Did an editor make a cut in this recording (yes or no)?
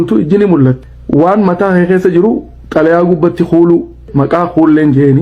yes